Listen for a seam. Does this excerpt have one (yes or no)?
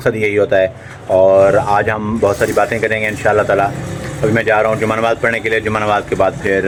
no